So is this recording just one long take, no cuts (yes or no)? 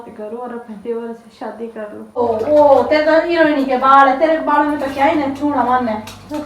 no